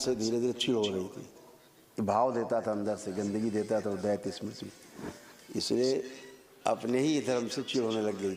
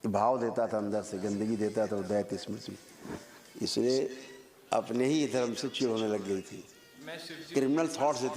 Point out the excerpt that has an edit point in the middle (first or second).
second